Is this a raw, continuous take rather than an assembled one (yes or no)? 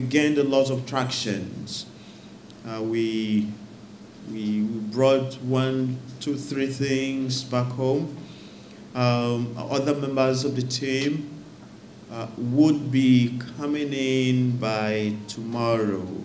yes